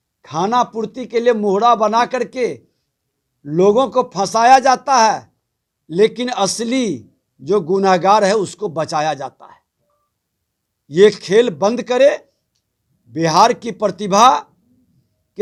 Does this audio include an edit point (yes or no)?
no